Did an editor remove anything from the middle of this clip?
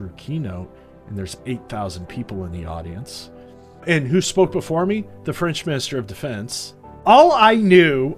yes; 2 cuts; at 3.8 s, 6.9 s

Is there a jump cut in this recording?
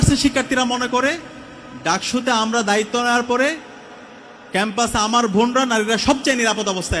no; 0 cuts

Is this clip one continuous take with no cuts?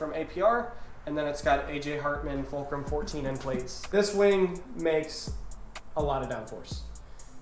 no; 1 cut; at 3.8 s

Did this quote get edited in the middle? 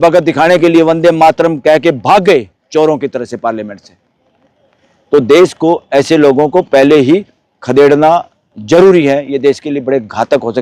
no; 0 cuts

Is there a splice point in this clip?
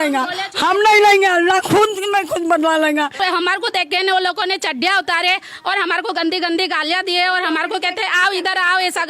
yes; 1 cut; at 3.2 s

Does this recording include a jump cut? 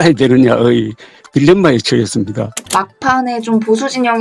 yes; 1 cut; at 2.5 s

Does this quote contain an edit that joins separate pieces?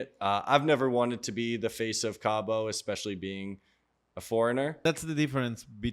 yes; 1 cut; at 4.8 s

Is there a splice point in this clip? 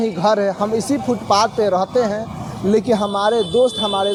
no; 0 cuts

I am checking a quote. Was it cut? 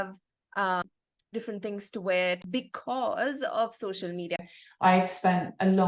yes; 3 cuts; at 0.9 s, 2.4 s, 4.5 s

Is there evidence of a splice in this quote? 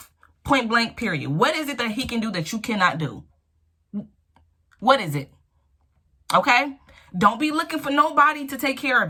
no; 0 cuts

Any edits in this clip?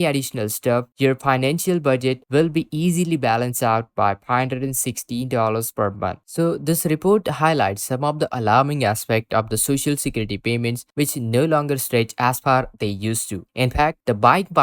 no; 0 cuts

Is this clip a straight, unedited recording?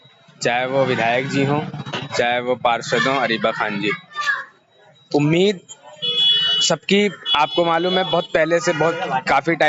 yes; 0 cuts

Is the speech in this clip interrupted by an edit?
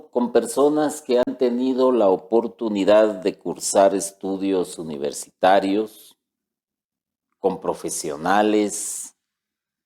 no; 0 cuts

